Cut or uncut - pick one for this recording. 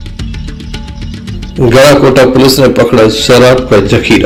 uncut